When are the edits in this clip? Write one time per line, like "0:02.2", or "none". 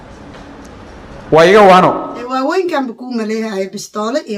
0:02.2